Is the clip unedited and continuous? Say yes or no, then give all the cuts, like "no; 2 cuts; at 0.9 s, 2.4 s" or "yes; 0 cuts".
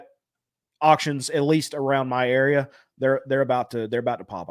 yes; 0 cuts